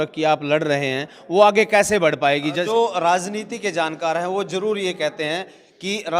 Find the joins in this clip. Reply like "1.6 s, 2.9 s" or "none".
2.7 s